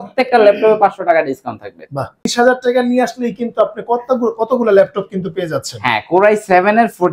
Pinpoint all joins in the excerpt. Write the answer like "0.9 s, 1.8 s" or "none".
2.2 s